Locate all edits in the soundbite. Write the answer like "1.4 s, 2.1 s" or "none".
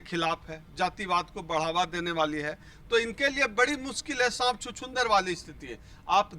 none